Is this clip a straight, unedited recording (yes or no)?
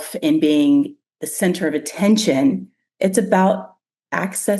yes